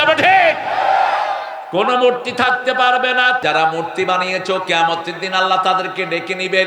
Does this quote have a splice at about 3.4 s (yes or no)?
yes